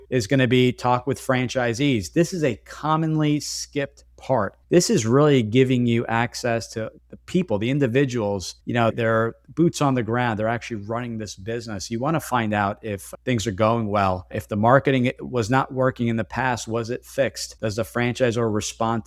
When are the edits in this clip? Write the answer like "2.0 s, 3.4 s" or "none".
none